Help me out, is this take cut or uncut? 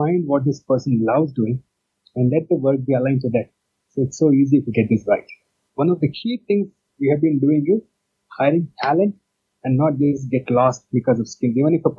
cut